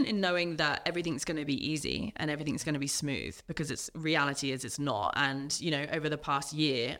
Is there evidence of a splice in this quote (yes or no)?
no